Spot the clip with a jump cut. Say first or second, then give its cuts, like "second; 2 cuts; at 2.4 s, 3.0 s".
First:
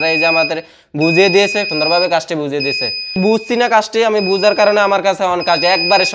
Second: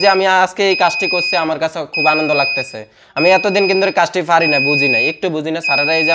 first; 2 cuts; at 1.7 s, 3.2 s